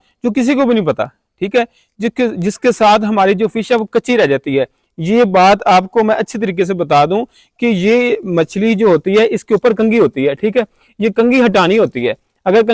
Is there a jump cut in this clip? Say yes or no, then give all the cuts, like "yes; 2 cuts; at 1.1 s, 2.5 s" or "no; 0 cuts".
no; 0 cuts